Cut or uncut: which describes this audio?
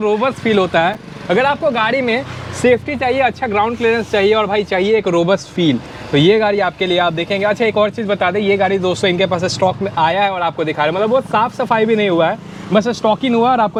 uncut